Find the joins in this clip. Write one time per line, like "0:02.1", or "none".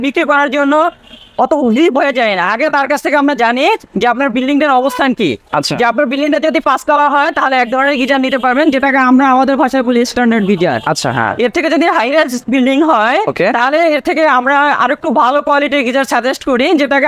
none